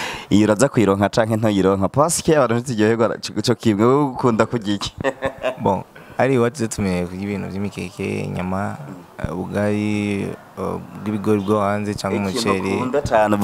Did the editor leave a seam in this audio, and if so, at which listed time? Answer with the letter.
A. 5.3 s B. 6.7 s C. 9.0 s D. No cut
D